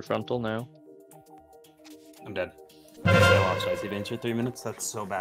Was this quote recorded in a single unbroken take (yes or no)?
yes